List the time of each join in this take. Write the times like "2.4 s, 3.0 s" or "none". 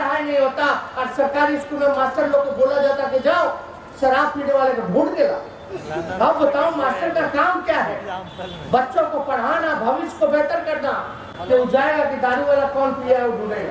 none